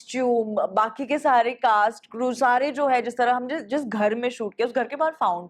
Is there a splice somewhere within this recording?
no; 0 cuts

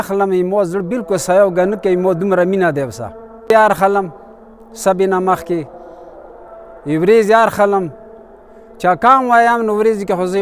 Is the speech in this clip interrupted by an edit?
yes; 1 cut; at 3.5 s

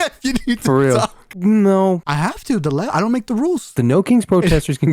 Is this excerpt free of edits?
no; 3 cuts; at 1.2 s, 2.1 s, 3.7 s

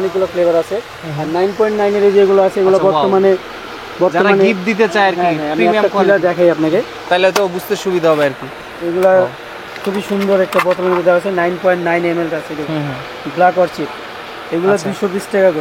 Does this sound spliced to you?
no; 0 cuts

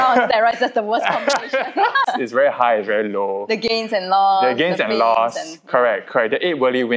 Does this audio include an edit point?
yes; 1 cut; at 2.1 s

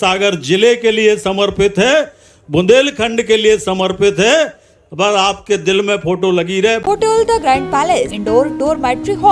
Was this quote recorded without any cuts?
no; 2 cuts; at 6.8 s, 8.2 s

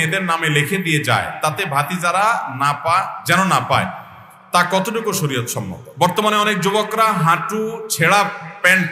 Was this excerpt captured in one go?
no; 1 cut; at 5.8 s

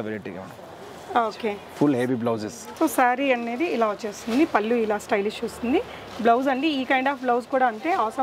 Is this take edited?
yes; 1 cut; at 2.6 s

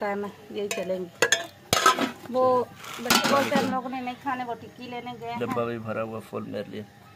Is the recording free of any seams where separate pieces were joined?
yes; 0 cuts

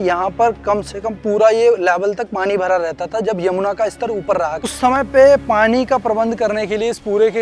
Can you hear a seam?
yes; 1 cut; at 4.6 s

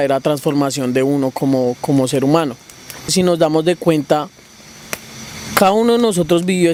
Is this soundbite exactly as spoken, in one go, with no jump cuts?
yes; 0 cuts

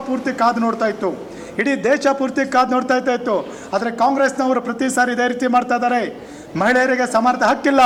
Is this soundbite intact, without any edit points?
yes; 0 cuts

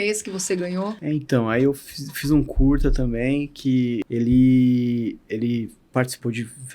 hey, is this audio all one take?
no; 2 cuts; at 1.0 s, 4.0 s

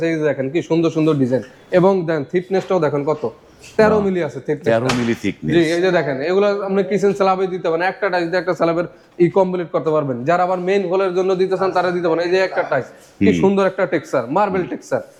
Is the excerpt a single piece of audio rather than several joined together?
yes; 0 cuts

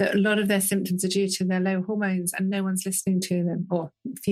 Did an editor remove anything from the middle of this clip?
no; 0 cuts

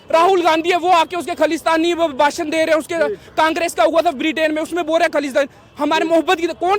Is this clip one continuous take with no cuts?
yes; 0 cuts

